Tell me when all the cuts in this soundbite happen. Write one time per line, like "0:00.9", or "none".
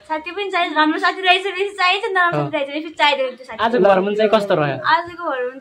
0:03.9